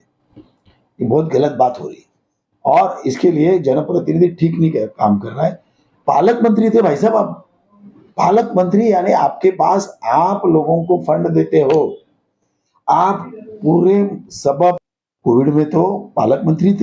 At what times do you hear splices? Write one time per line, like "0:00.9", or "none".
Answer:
0:14.8